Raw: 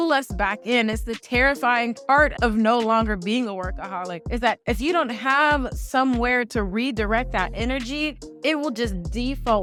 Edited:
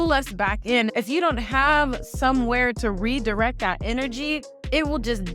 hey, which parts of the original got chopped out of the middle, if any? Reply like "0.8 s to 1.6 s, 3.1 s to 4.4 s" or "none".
0.9 s to 4.6 s